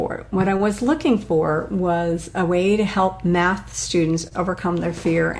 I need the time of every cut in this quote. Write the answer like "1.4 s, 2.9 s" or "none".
none